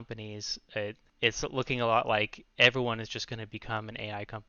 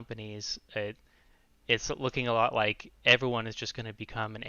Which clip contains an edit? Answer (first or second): first